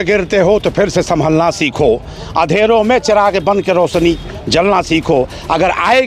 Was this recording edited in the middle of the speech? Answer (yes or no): no